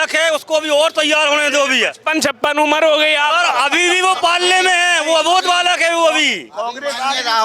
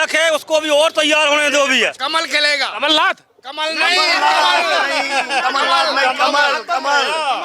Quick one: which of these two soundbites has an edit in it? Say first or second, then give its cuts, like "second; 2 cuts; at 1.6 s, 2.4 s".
second; 1 cut; at 2.0 s